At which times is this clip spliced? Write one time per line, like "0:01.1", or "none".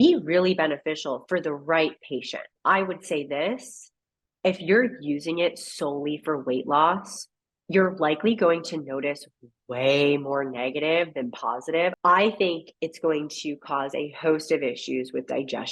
0:02.4
0:12.0